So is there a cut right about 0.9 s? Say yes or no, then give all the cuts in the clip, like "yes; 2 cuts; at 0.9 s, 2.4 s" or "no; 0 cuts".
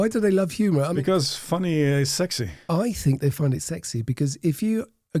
yes; 2 cuts; at 0.9 s, 2.5 s